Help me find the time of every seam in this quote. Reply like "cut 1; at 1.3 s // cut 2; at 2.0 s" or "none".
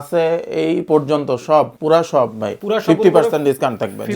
cut 1; at 1.8 s // cut 2; at 2.6 s

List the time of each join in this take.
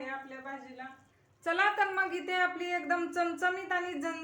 cut 1; at 1.0 s

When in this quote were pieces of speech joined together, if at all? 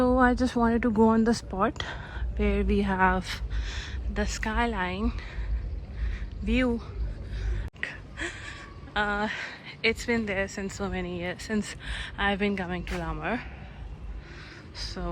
cut 1; at 7.7 s

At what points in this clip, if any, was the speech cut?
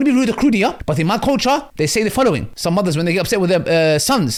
none

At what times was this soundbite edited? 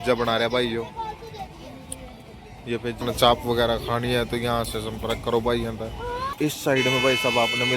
cut 1; at 3.0 s // cut 2; at 6.3 s

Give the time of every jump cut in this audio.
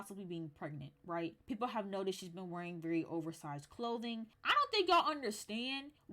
cut 1; at 1.4 s // cut 2; at 4.4 s

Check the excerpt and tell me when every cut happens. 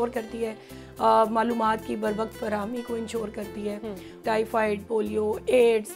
cut 1; at 4.2 s

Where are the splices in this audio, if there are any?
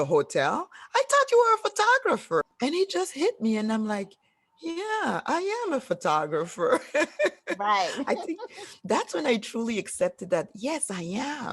cut 1; at 2.4 s

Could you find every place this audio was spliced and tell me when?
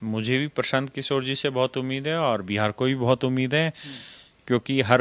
none

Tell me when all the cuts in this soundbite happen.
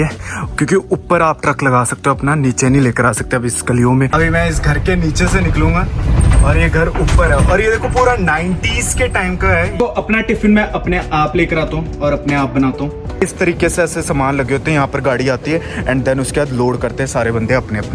cut 1; at 4.1 s // cut 2; at 9.8 s // cut 3; at 13.1 s

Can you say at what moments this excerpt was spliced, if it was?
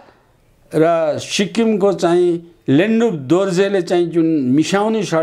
none

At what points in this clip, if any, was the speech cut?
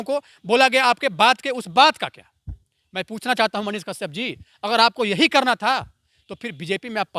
none

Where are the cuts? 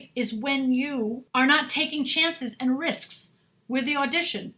cut 1; at 1.2 s

